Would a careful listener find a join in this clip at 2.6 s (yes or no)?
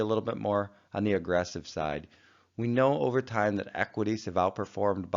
yes